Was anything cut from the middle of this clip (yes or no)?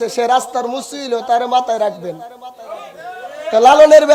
no